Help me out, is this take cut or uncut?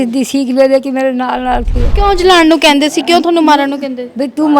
cut